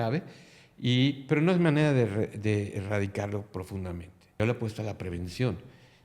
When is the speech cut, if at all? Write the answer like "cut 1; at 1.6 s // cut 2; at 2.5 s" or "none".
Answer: cut 1; at 4.4 s